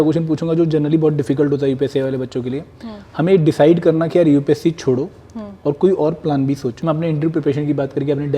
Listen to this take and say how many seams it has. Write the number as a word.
one